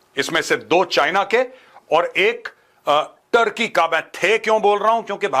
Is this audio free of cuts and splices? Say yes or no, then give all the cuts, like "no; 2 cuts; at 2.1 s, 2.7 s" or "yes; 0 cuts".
yes; 0 cuts